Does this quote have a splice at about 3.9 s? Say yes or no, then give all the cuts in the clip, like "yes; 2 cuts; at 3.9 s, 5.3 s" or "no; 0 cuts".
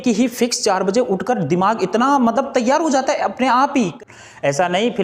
yes; 1 cut; at 3.9 s